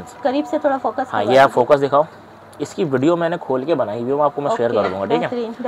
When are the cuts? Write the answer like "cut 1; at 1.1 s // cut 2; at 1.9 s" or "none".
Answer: none